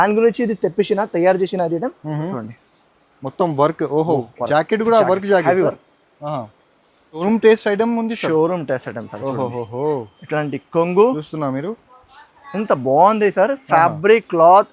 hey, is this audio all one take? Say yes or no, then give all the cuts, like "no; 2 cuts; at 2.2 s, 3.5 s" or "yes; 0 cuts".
no; 1 cut; at 7.2 s